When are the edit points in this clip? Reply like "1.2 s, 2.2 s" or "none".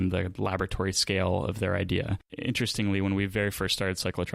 2.2 s